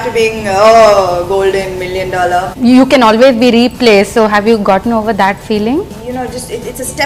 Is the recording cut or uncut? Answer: cut